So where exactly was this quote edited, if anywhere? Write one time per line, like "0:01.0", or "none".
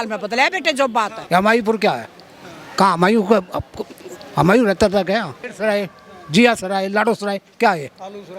0:01.2
0:05.4

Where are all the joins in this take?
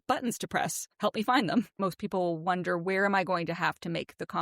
0:01.7

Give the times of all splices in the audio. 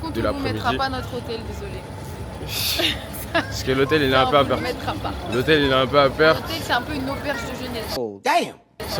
none

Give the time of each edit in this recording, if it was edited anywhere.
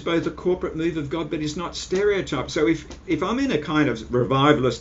none

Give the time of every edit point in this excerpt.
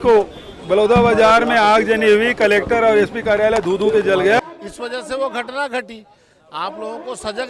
0:04.4

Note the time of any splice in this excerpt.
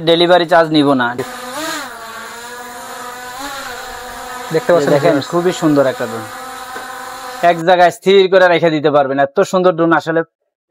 0:01.2

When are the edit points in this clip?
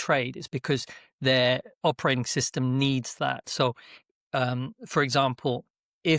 none

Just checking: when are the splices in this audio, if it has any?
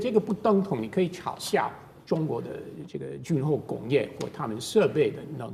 none

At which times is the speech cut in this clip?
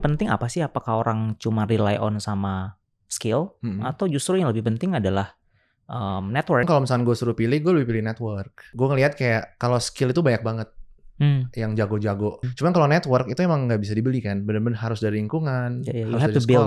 0:06.7
0:08.6
0:12.5

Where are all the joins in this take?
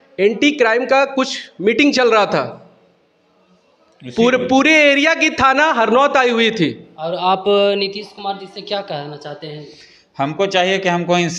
0:06.9

